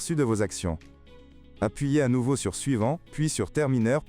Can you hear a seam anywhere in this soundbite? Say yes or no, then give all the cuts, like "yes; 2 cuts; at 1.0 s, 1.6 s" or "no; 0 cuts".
yes; 1 cut; at 3.1 s